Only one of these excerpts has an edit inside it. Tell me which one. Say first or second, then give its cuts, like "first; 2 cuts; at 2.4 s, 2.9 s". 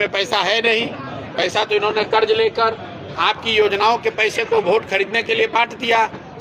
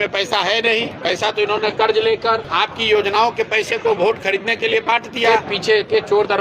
second; 3 cuts; at 0.9 s, 2.5 s, 5.4 s